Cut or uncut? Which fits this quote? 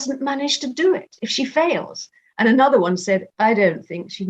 uncut